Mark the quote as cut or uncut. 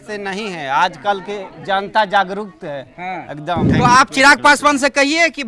cut